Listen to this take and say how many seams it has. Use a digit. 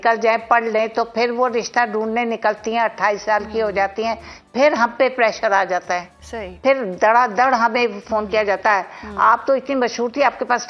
0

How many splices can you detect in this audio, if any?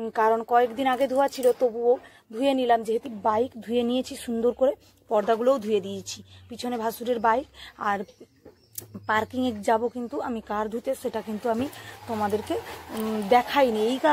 1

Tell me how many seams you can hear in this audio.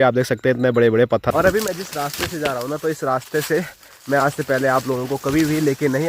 1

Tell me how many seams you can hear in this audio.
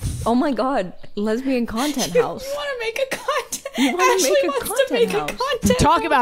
1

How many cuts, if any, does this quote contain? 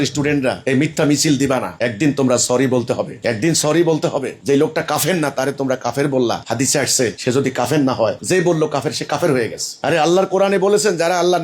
1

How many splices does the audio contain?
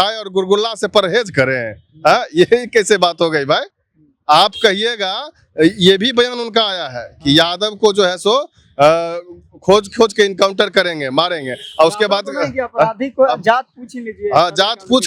0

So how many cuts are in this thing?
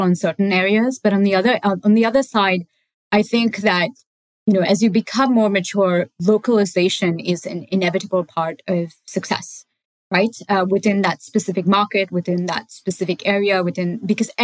0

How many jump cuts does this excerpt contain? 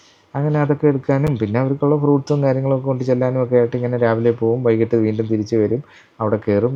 0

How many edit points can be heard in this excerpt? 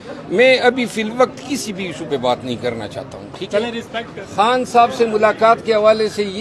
1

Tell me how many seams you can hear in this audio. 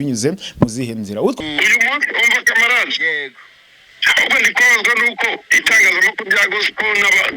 1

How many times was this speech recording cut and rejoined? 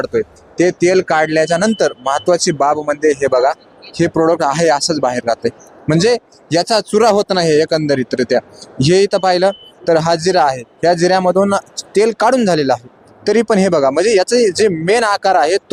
0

